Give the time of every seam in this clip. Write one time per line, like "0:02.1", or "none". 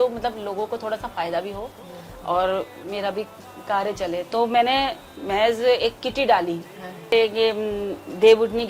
0:07.1